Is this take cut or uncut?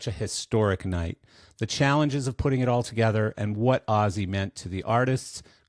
uncut